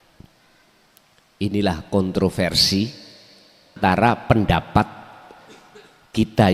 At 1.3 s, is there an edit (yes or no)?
no